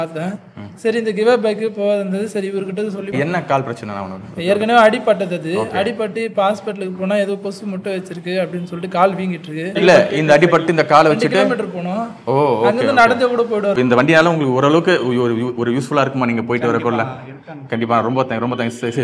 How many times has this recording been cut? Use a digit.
3